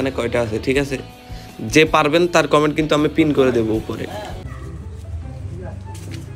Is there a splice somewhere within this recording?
yes; 1 cut; at 4.4 s

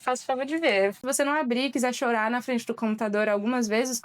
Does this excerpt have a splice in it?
yes; 1 cut; at 1.0 s

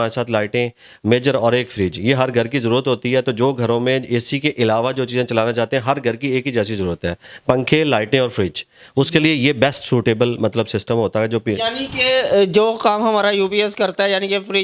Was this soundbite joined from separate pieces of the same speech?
no; 0 cuts

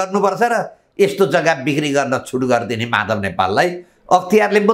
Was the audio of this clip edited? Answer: no; 0 cuts

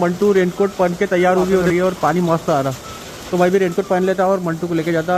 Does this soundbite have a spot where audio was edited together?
no; 0 cuts

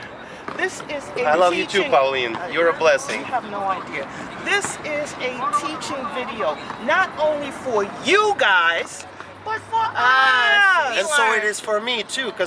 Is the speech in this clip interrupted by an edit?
no; 0 cuts

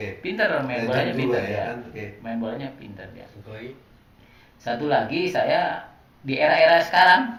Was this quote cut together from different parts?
no; 0 cuts

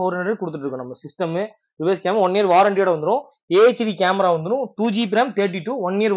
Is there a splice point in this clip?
no; 0 cuts

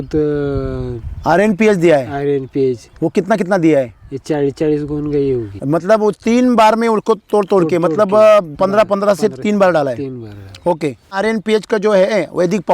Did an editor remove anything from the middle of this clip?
yes; 2 cuts; at 5.5 s, 11.2 s

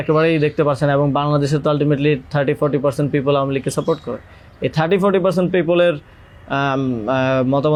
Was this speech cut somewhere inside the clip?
no; 0 cuts

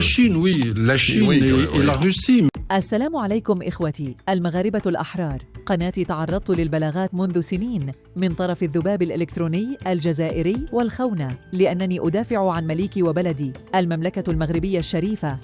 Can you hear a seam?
yes; 1 cut; at 2.5 s

